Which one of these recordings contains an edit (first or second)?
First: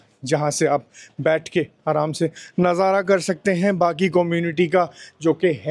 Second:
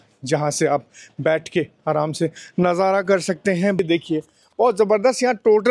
second